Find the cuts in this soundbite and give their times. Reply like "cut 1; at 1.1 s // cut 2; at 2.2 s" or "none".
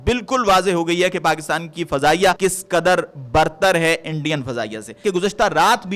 cut 1; at 2.4 s // cut 2; at 5.0 s